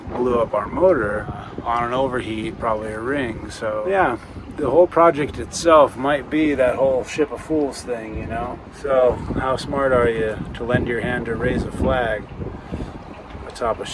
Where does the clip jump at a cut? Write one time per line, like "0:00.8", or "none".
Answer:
0:01.5
0:03.8
0:08.7

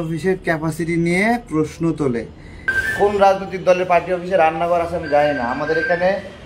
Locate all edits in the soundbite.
0:02.8

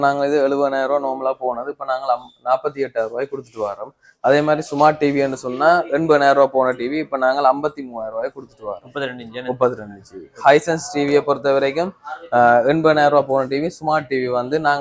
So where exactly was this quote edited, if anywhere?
none

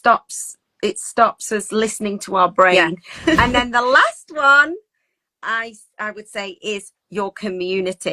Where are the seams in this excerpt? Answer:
0:03.4

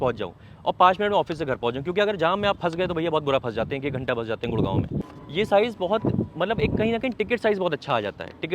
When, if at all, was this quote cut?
0:05.2

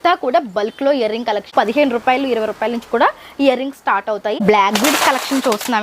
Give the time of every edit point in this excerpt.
0:01.5
0:04.4

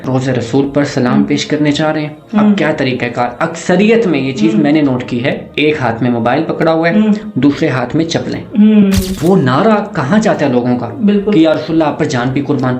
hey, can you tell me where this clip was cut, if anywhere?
0:09.1

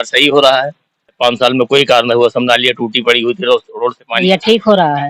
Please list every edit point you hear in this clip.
0:01.2
0:04.2

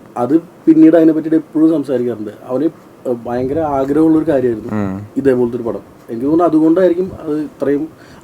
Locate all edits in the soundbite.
none

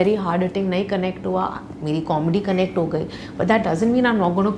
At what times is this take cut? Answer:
none

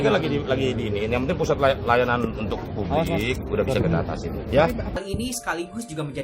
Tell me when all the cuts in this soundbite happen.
0:05.0

